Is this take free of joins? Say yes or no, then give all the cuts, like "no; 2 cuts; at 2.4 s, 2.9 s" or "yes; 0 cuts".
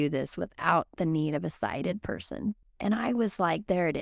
no; 1 cut; at 2.7 s